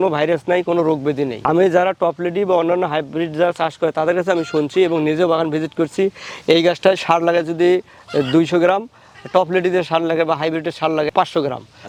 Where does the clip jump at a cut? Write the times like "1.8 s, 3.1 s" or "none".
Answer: none